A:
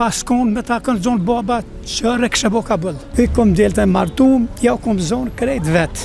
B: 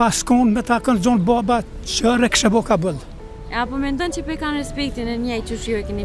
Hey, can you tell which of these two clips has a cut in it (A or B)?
A